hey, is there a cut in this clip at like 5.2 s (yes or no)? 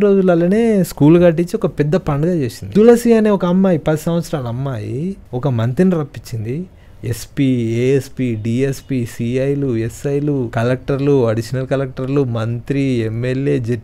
yes